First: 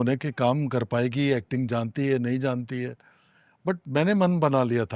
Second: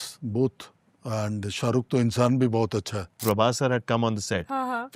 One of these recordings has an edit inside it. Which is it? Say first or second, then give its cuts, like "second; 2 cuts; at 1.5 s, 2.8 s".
second; 1 cut; at 3.2 s